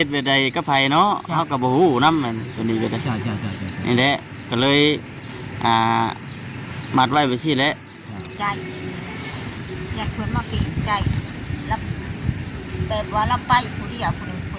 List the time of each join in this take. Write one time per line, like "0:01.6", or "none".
0:08.3